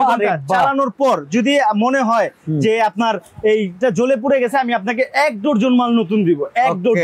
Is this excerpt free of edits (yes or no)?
yes